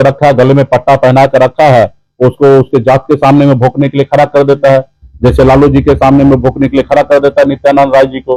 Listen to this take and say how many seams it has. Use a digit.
0